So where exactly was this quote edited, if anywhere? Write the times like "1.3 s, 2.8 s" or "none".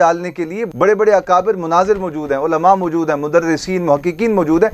none